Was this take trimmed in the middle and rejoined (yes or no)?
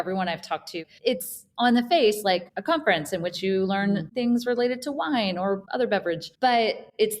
yes